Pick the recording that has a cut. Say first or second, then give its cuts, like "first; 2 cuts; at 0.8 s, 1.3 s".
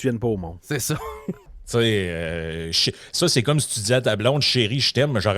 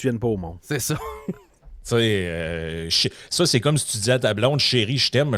first; 1 cut; at 1.5 s